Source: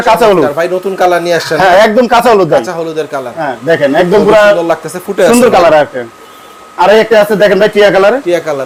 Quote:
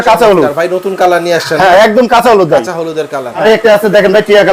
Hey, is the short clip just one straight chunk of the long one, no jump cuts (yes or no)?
no